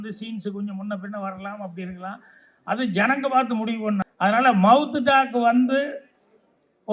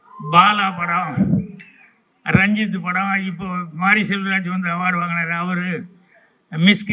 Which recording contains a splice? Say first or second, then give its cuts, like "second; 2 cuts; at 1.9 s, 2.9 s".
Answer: first; 1 cut; at 4.1 s